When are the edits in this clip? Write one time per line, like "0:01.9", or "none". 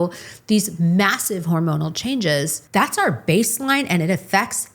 0:02.6